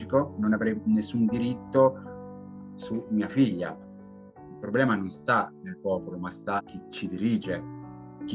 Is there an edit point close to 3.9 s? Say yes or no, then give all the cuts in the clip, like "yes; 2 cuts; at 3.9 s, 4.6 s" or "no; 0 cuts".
yes; 1 cut; at 3.9 s